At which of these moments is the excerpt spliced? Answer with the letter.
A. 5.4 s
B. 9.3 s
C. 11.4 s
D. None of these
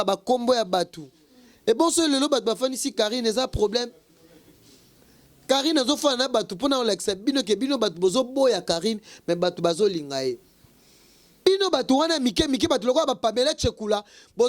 C